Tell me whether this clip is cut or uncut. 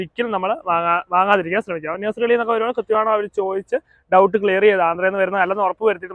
uncut